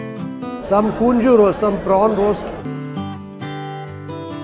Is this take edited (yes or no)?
yes